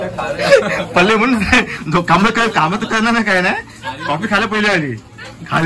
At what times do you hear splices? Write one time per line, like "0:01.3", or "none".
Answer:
none

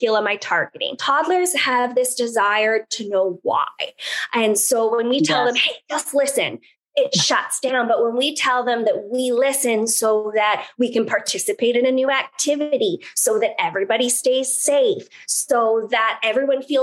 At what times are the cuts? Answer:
0:01.0

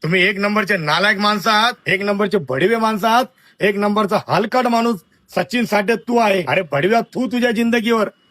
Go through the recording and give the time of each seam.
0:01.8
0:06.5

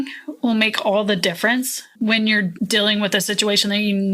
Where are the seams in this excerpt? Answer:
0:02.5

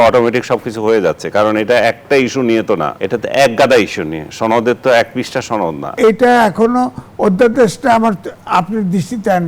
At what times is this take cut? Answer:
0:02.9
0:06.0

